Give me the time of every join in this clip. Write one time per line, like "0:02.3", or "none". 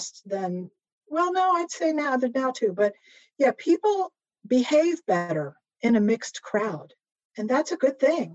0:00.9